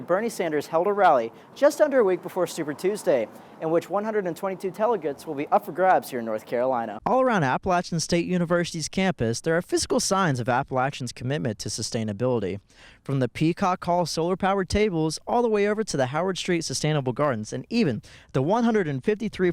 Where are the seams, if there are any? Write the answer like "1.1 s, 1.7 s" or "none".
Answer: 6.9 s